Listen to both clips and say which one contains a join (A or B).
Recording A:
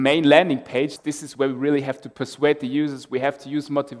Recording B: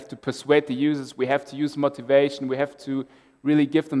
A